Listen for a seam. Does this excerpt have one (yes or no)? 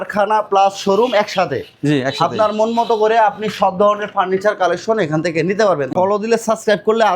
yes